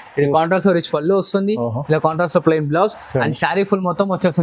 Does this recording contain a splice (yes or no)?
no